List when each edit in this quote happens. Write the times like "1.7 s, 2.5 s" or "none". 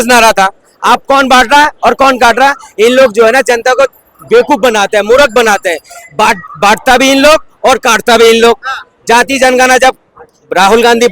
none